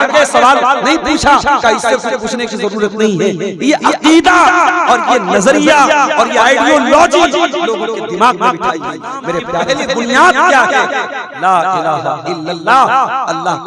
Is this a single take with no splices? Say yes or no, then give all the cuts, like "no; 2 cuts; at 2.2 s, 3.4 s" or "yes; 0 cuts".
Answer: no; 1 cut; at 9.5 s